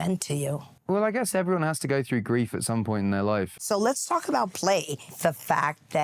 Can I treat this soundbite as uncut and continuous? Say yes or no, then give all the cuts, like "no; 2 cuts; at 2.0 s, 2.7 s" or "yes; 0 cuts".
no; 2 cuts; at 3.5 s, 5.1 s